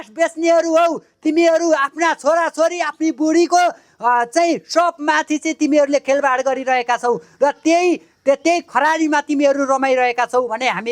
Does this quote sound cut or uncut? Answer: uncut